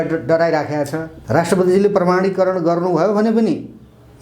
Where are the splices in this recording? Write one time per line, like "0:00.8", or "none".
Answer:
0:01.1